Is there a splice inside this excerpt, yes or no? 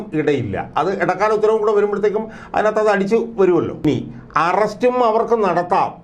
yes